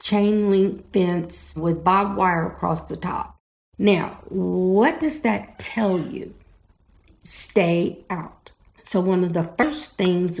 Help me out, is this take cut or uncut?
cut